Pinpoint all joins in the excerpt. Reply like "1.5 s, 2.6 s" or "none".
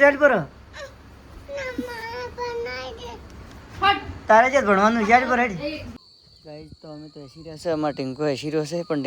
6.0 s